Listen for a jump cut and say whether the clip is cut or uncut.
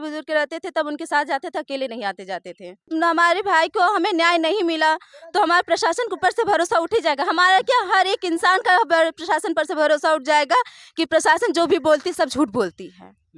cut